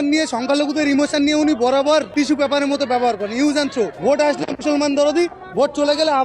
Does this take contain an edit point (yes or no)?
yes